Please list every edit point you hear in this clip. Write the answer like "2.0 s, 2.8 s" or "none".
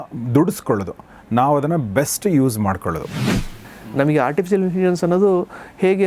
3.4 s